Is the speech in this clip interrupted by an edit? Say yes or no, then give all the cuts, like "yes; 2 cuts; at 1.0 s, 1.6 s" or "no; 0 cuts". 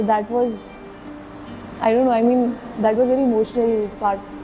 no; 0 cuts